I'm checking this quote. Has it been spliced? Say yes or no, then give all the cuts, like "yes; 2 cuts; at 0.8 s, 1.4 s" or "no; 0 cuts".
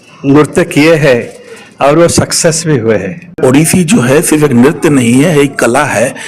yes; 1 cut; at 3.4 s